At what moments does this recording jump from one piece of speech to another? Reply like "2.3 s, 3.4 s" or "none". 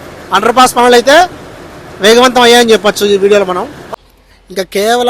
3.8 s